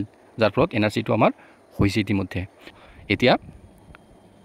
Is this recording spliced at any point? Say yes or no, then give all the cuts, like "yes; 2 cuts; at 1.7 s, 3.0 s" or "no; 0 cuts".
yes; 1 cut; at 2.7 s